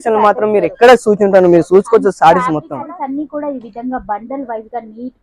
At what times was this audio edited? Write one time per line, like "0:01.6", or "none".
0:02.9